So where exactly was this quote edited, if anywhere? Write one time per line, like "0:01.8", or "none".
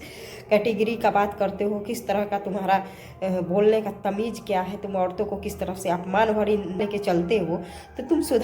0:06.8